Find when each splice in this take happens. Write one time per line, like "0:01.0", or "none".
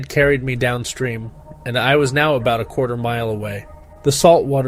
none